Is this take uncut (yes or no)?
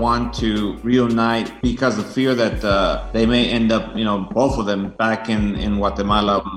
no